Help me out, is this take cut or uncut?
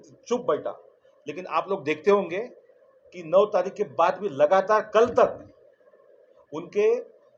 uncut